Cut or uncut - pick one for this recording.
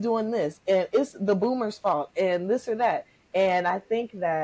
uncut